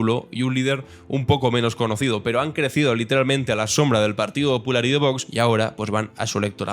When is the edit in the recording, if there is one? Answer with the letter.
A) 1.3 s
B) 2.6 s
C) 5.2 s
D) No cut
C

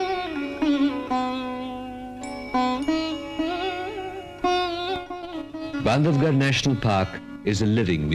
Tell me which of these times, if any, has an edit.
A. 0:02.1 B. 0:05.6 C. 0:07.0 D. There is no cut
D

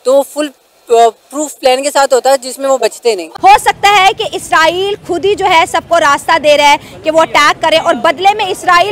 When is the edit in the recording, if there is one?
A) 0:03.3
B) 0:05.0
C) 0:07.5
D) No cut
A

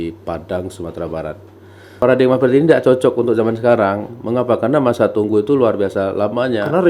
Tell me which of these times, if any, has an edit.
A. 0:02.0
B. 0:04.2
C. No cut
A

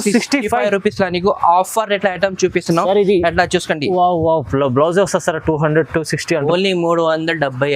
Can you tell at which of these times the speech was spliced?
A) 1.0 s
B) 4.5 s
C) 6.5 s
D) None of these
C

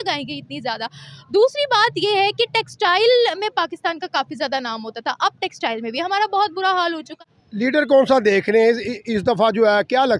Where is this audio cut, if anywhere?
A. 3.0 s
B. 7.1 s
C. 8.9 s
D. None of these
B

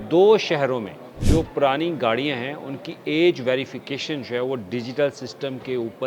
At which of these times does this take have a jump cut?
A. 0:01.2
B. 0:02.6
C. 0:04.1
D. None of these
A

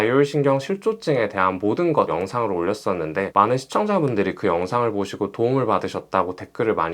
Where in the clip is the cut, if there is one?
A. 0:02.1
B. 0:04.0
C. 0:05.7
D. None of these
A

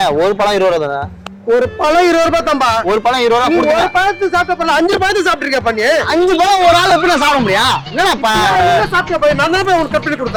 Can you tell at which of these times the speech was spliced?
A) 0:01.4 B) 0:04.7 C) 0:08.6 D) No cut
D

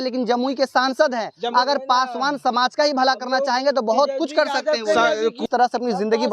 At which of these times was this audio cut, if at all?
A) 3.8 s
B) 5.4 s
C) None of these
B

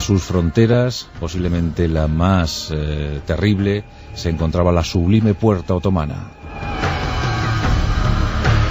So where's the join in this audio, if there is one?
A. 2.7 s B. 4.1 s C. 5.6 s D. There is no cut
B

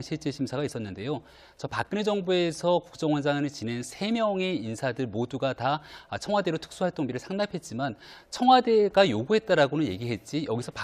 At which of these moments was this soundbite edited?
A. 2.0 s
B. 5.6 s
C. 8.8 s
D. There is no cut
D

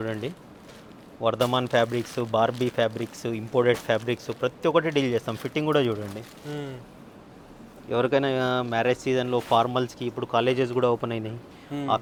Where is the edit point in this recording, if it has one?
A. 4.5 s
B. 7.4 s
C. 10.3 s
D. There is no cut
D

